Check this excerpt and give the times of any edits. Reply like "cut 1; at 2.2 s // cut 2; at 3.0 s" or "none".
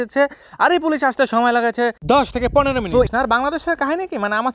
cut 1; at 3.1 s